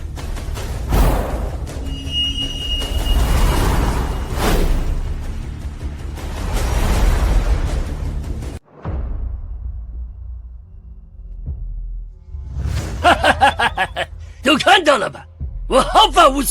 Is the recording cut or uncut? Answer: cut